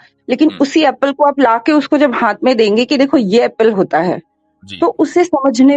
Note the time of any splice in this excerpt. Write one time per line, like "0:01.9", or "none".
none